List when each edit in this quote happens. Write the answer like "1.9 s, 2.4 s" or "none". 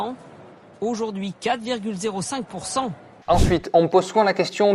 3.2 s